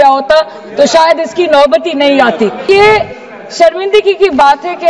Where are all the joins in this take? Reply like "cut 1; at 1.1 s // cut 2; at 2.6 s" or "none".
cut 1; at 2.7 s